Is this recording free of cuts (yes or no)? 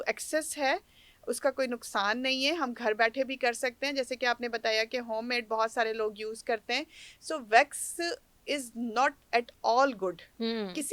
yes